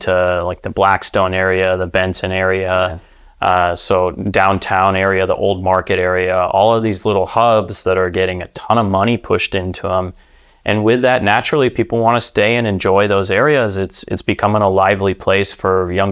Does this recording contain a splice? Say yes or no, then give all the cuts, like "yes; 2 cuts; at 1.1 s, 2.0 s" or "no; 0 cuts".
no; 0 cuts